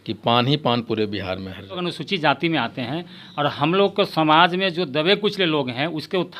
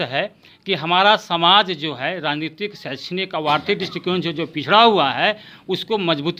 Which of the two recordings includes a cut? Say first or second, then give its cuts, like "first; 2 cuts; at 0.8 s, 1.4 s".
first; 1 cut; at 1.8 s